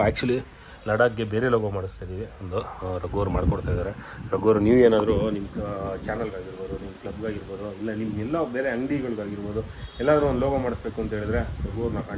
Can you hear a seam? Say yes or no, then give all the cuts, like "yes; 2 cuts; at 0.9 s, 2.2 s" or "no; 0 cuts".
no; 0 cuts